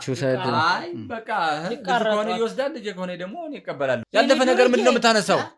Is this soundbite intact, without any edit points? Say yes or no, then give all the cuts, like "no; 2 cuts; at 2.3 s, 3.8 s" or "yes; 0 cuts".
no; 1 cut; at 4.0 s